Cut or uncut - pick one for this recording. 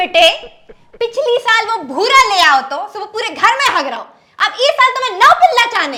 uncut